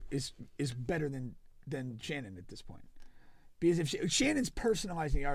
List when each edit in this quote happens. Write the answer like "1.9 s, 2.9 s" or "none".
none